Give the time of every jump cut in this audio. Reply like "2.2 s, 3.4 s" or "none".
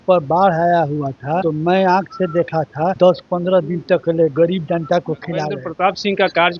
1.4 s, 3.0 s, 5.6 s